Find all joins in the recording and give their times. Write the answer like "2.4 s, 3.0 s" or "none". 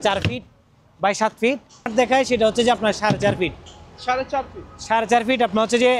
1.8 s